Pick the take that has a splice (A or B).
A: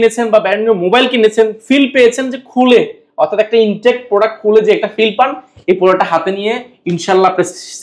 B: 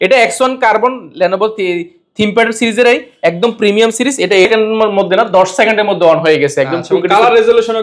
B